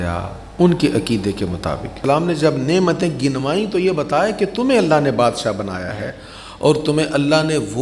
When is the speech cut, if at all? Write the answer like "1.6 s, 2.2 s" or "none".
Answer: 2.1 s